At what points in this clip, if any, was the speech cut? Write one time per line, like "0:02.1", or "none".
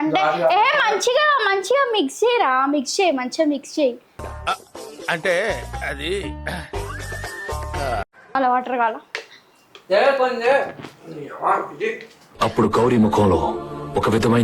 0:08.3